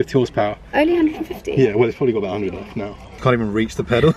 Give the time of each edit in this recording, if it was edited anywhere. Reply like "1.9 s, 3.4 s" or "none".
3.2 s